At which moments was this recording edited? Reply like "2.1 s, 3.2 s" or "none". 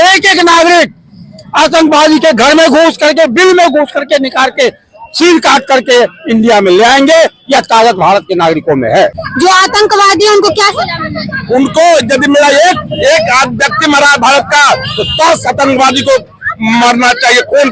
9.2 s

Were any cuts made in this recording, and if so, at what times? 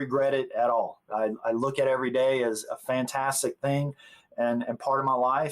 1.1 s, 2.6 s

